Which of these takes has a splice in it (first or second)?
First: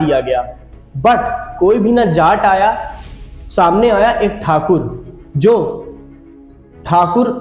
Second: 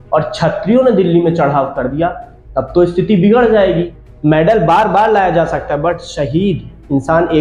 second